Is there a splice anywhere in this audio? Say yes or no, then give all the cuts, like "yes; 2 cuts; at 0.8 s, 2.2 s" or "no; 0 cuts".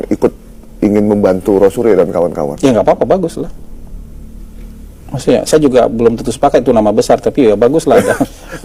no; 0 cuts